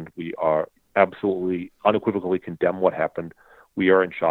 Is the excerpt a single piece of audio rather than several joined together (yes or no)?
yes